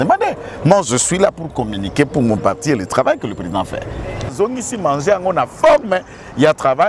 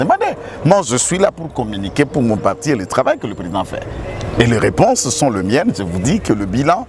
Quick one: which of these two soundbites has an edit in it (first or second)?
first